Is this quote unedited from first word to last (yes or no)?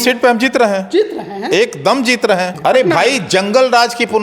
no